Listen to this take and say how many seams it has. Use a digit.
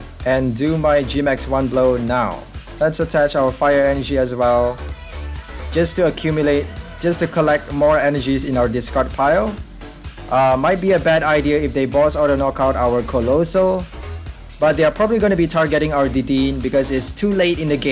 0